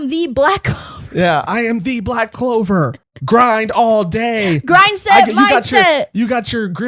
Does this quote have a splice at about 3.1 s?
yes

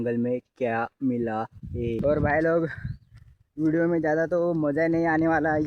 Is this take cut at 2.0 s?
yes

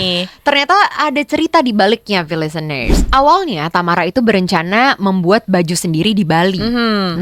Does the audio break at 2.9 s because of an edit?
yes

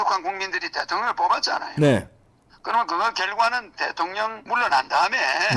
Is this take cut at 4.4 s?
yes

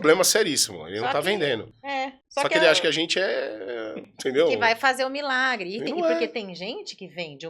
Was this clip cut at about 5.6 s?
no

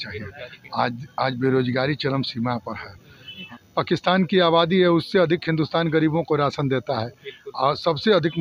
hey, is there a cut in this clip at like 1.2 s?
no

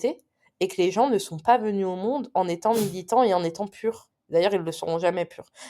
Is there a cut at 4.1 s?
yes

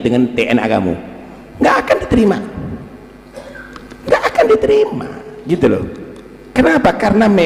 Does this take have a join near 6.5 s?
no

